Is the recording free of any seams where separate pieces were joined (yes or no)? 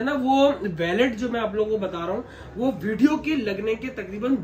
yes